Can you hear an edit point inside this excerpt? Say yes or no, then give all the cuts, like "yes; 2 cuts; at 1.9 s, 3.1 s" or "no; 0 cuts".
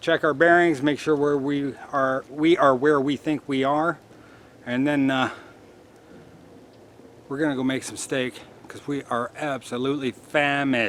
no; 0 cuts